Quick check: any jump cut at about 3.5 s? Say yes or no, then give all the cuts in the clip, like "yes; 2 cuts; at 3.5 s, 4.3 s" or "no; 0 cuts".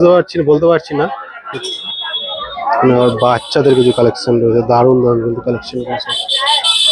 no; 1 cut; at 1.5 s